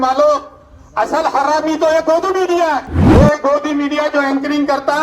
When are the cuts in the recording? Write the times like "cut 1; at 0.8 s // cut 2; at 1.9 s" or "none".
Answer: cut 1; at 2.9 s